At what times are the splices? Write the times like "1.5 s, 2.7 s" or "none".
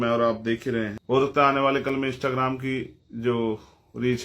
1.0 s